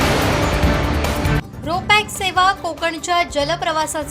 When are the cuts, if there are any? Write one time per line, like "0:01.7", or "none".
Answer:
0:01.3